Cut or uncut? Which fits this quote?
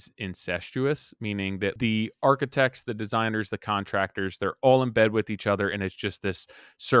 cut